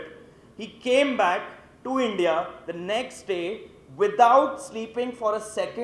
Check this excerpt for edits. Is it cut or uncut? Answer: uncut